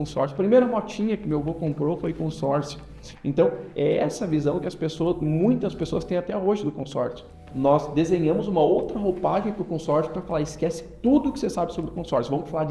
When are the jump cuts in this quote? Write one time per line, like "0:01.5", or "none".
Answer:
0:07.4